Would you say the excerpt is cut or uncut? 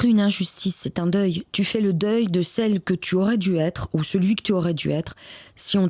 uncut